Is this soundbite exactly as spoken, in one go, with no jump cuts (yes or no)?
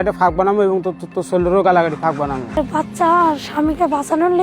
no